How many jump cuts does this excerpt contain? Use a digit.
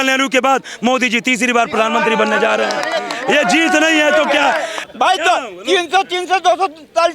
1